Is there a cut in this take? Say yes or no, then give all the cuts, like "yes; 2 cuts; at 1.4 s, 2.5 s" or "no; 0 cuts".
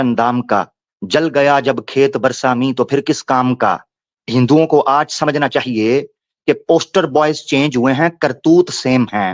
no; 0 cuts